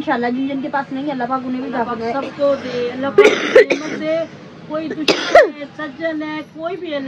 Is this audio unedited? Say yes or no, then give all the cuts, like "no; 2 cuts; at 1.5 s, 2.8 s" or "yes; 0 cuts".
yes; 0 cuts